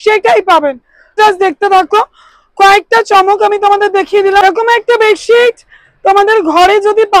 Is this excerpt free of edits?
no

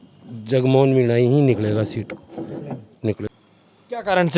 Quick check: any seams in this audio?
yes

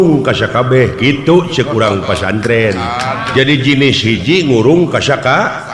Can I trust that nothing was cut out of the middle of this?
no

